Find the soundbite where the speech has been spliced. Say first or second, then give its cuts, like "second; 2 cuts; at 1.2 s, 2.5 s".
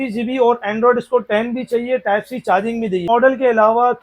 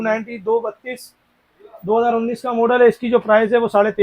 first; 1 cut; at 3.1 s